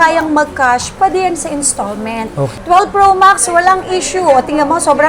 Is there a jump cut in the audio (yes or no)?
yes